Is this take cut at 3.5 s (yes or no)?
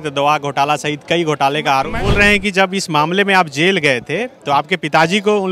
no